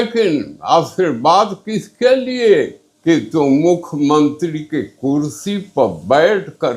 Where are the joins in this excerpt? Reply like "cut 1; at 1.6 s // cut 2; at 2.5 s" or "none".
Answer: cut 1; at 2.8 s